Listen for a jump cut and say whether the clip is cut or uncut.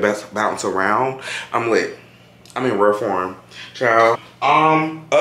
cut